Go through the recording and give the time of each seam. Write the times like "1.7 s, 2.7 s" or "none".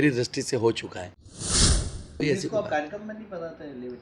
1.6 s